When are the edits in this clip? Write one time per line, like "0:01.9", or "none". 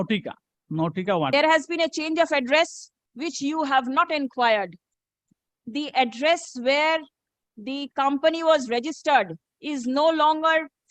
0:01.3